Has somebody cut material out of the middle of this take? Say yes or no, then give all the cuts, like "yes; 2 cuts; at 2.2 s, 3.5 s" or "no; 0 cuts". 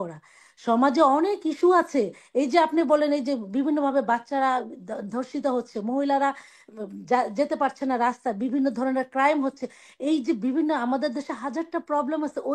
no; 0 cuts